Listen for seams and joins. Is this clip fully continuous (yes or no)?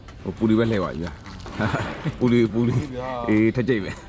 yes